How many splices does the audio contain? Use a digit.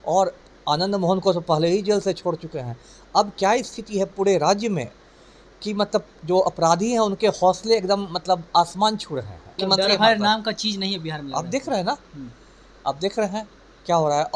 1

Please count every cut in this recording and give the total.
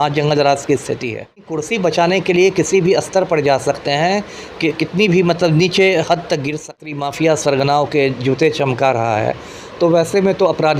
2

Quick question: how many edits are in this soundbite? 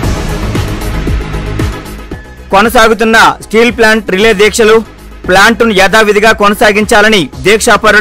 1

